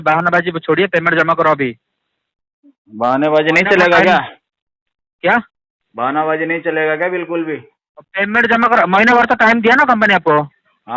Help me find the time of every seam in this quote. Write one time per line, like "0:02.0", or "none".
none